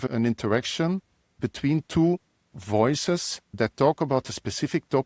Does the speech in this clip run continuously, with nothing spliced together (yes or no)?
yes